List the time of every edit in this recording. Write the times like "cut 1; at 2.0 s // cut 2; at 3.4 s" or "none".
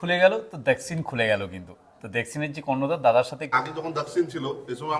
cut 1; at 3.5 s

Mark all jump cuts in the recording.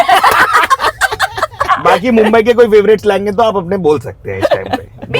cut 1; at 1.6 s

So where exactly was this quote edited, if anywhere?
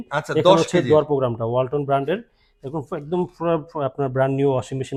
none

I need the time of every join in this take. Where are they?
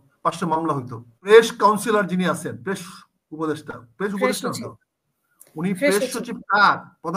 cut 1; at 1.3 s

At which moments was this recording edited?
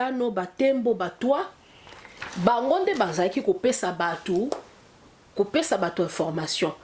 none

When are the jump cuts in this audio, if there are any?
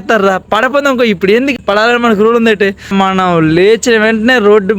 cut 1; at 2.9 s

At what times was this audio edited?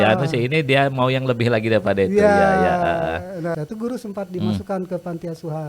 cut 1; at 3.5 s

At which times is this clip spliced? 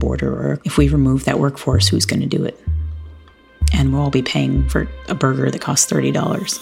cut 1; at 4.7 s

